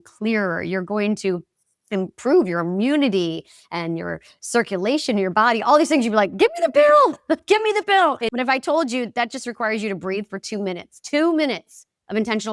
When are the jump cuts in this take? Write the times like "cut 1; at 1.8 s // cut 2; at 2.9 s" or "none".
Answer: cut 1; at 8.3 s